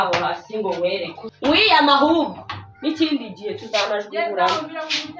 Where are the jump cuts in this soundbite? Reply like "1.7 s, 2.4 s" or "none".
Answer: 1.2 s